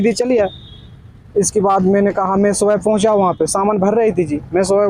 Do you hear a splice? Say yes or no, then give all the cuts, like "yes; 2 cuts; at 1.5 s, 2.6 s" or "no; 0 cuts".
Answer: no; 0 cuts